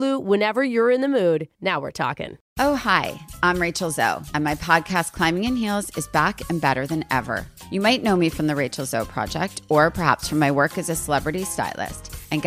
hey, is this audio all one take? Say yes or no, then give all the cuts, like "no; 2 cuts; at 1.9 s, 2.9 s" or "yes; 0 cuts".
no; 1 cut; at 2.4 s